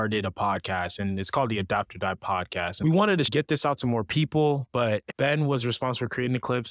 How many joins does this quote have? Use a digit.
3